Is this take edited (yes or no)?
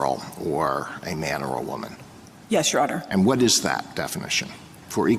no